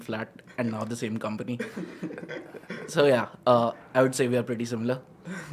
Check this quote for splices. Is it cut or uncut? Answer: uncut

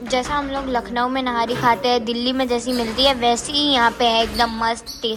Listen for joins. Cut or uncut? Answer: uncut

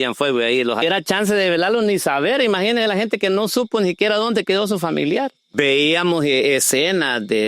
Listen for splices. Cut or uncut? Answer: cut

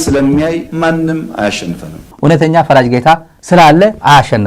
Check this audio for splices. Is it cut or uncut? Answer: uncut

